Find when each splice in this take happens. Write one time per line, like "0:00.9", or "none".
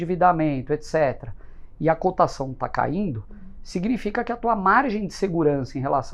none